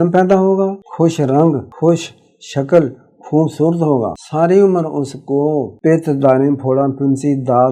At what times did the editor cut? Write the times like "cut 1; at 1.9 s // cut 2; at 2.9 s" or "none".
cut 1; at 0.8 s // cut 2; at 1.7 s // cut 3; at 4.2 s // cut 4; at 5.7 s